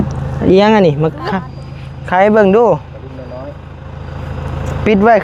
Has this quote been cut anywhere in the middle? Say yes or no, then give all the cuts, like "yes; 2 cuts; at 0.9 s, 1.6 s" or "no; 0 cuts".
no; 0 cuts